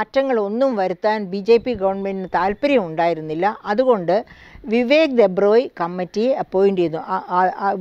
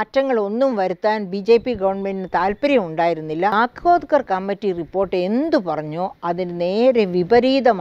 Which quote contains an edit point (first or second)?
second